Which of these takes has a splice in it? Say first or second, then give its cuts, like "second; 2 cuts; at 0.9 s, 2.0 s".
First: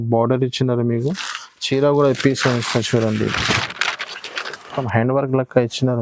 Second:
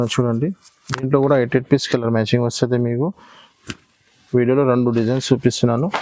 first; 1 cut; at 4.7 s